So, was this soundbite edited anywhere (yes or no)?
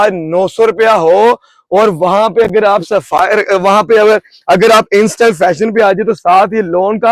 no